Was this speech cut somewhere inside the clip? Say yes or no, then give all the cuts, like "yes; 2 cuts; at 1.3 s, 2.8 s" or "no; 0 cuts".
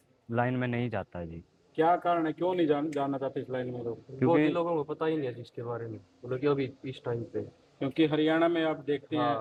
no; 0 cuts